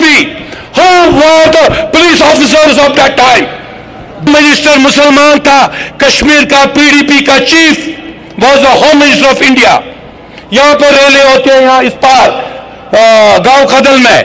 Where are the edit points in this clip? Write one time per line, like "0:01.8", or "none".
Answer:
0:04.3